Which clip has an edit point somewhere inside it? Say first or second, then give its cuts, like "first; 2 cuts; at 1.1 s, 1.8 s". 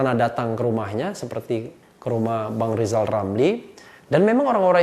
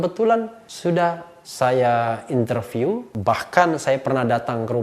second; 2 cuts; at 1.0 s, 3.1 s